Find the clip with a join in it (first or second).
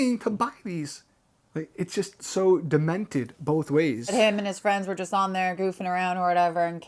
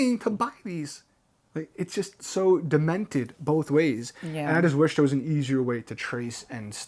first